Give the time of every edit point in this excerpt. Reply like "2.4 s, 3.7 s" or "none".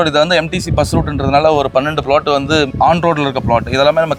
none